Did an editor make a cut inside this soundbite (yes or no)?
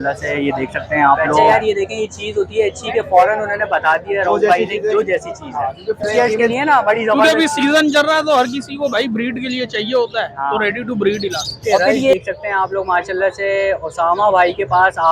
yes